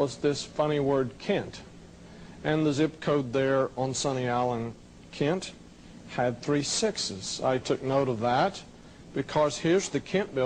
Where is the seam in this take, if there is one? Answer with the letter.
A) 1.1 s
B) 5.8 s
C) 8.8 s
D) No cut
B